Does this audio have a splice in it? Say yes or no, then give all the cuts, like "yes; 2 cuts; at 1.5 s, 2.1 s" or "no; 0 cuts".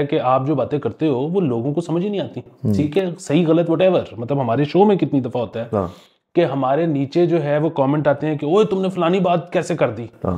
no; 0 cuts